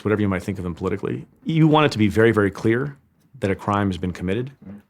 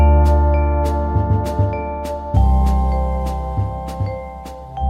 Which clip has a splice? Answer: first; 1 cut; at 1.3 s

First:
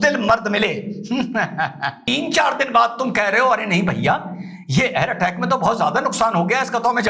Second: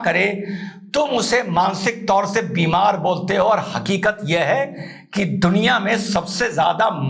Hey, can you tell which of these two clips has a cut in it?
first; 1 cut; at 2.0 s

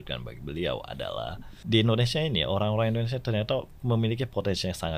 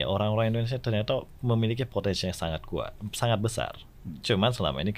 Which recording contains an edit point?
first; 1 cut; at 1.5 s

